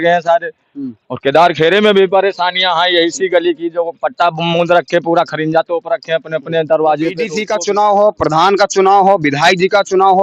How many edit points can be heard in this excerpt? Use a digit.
1